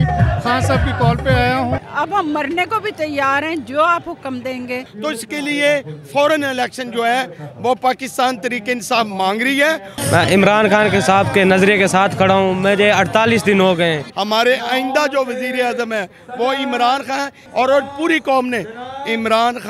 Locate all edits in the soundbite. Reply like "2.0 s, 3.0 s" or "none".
1.9 s, 4.9 s, 9.9 s, 14.1 s, 17.4 s